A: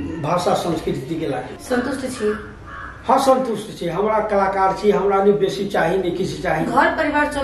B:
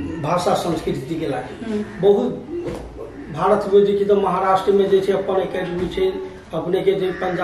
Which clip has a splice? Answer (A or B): A